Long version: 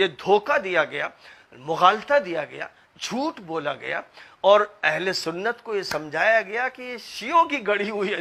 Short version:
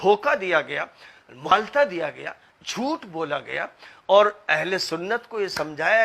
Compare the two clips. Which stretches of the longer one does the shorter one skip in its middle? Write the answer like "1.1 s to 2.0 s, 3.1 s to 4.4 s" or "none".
1.7 s to 1.9 s